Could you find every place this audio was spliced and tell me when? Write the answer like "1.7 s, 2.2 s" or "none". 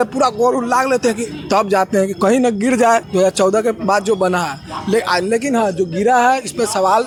none